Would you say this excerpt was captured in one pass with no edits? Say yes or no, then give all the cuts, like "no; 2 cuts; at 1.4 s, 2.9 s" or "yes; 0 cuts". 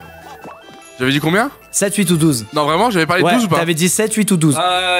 yes; 0 cuts